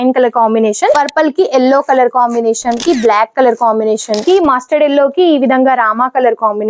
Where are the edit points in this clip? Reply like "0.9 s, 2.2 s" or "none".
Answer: 0.9 s, 2.8 s, 4.2 s